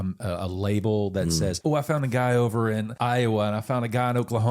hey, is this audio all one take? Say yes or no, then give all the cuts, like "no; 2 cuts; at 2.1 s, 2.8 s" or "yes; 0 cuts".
no; 2 cuts; at 1.6 s, 2.9 s